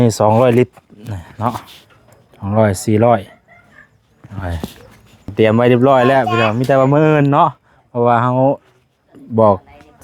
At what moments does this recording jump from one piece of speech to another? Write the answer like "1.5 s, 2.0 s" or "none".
5.3 s